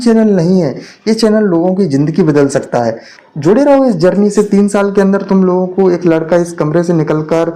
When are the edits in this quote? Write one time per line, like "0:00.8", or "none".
0:03.1